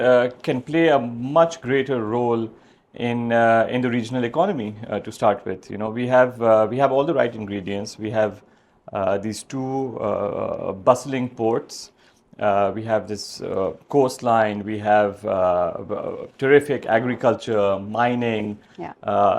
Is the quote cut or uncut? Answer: uncut